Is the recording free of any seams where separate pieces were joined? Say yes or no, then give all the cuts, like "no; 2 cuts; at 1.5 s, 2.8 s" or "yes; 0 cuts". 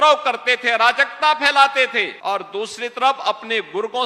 no; 1 cut; at 2.1 s